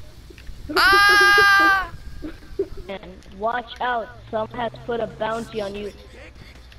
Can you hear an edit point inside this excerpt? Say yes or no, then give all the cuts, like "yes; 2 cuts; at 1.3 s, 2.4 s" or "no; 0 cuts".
yes; 1 cut; at 2.9 s